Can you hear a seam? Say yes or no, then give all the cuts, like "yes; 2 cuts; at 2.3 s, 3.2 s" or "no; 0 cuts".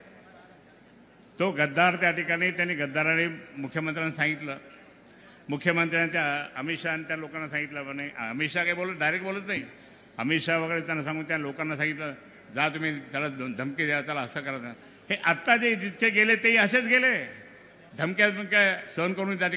no; 0 cuts